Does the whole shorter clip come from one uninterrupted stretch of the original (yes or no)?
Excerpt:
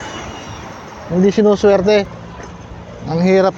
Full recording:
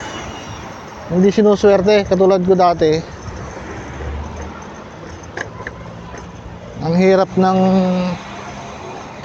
no